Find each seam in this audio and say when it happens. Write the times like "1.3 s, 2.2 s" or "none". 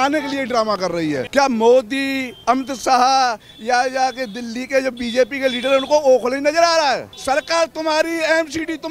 1.2 s, 7.1 s